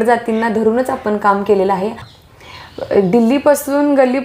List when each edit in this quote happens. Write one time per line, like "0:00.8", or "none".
0:02.1